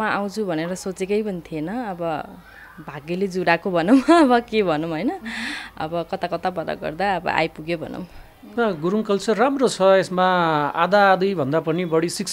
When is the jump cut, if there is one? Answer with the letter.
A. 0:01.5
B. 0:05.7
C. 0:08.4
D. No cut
C